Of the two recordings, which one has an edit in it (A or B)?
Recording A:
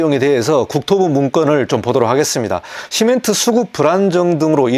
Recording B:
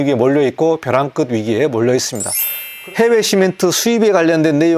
B